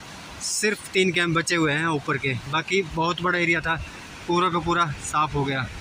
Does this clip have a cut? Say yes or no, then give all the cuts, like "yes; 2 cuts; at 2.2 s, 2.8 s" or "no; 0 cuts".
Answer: no; 0 cuts